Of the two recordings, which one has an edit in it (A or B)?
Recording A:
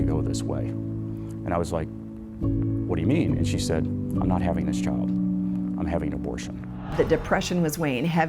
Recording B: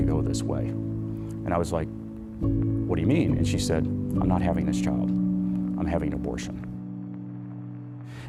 A